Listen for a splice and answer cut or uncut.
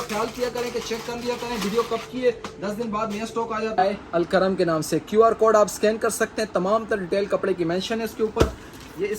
cut